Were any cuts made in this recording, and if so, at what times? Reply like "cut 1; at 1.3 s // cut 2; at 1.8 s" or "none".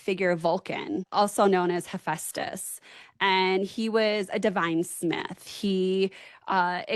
cut 1; at 1.1 s